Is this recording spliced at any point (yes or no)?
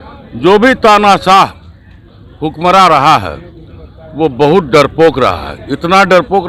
no